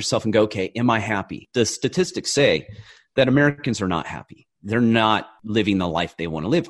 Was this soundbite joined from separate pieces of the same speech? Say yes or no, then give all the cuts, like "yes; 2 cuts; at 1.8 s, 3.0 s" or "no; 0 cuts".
yes; 1 cut; at 5.3 s